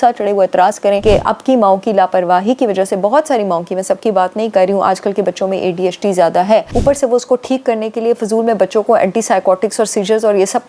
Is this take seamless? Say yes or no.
no